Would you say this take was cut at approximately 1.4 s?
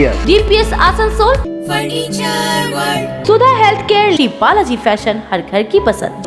yes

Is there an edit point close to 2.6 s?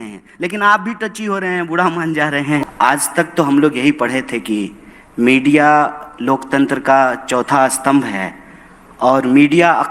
yes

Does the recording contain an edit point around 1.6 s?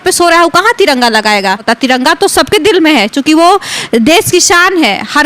yes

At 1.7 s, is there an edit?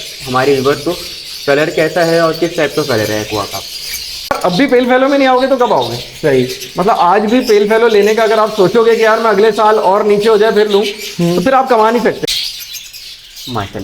no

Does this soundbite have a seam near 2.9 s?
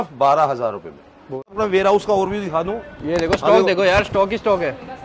no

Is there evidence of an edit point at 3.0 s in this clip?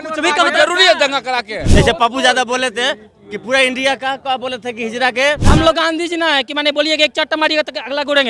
no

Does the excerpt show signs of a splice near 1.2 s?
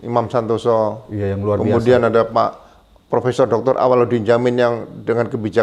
no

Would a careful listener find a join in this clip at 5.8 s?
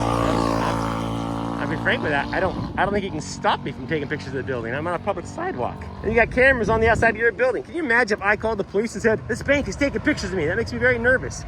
yes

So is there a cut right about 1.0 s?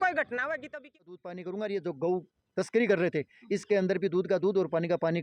yes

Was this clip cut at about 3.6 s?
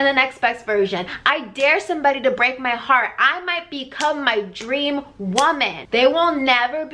no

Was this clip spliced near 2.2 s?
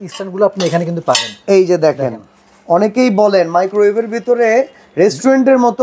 no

